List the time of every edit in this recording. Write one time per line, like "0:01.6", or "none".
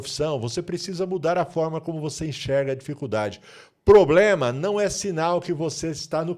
none